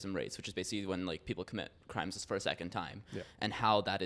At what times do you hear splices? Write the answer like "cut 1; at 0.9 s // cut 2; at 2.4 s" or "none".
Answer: none